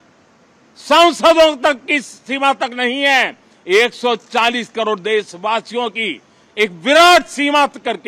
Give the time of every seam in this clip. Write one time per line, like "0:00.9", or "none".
none